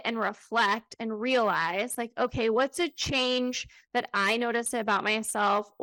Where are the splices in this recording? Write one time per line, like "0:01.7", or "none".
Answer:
none